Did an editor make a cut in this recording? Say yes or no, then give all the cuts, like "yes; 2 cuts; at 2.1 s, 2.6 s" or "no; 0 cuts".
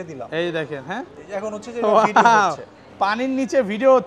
no; 0 cuts